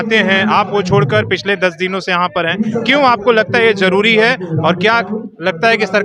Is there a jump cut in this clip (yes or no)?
no